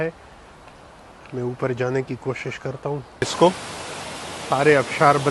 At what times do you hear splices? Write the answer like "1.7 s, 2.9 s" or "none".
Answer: 3.2 s